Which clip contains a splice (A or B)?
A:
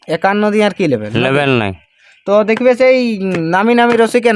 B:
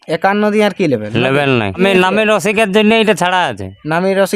B